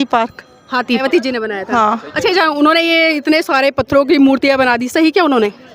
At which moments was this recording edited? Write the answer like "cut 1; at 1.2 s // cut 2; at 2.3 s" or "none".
cut 1; at 1.0 s